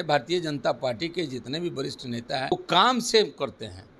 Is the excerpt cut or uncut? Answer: cut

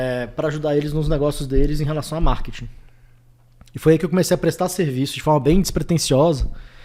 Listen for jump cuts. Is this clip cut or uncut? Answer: uncut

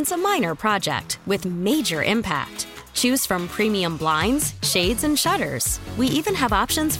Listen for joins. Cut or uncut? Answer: uncut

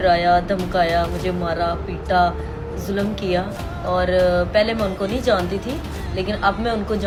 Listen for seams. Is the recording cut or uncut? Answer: uncut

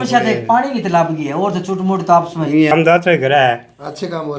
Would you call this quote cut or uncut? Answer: cut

